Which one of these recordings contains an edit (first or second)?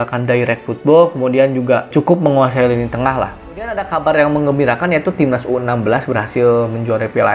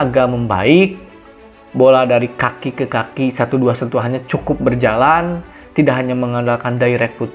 first